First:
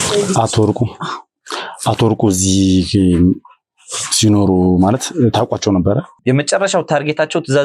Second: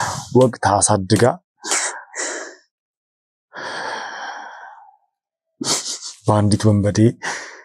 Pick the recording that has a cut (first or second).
first